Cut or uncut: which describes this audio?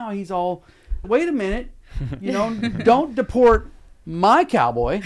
cut